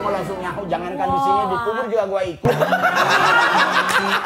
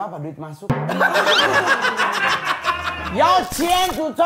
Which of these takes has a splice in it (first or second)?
second